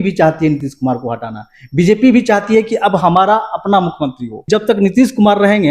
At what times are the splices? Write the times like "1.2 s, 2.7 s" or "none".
4.3 s